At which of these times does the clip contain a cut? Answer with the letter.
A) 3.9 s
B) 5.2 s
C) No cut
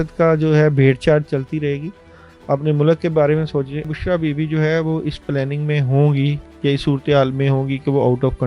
A